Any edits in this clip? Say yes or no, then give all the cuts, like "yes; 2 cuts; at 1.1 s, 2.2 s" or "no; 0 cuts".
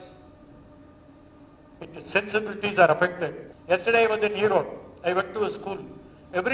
yes; 1 cut; at 3.5 s